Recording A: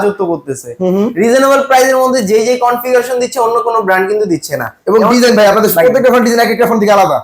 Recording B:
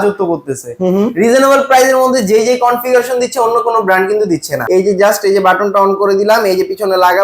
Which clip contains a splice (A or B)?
B